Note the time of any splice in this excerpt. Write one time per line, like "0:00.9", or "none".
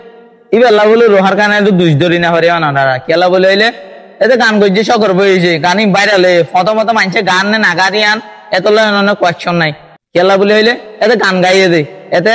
none